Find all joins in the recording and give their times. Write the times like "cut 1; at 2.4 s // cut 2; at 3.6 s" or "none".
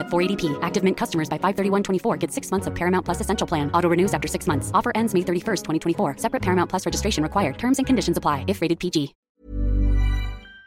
cut 1; at 9.2 s